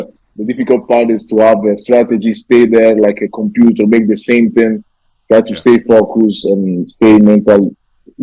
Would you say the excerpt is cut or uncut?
uncut